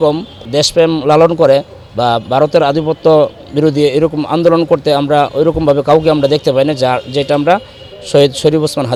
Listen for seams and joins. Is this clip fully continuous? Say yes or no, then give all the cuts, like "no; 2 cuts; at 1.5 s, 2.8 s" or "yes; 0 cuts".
yes; 0 cuts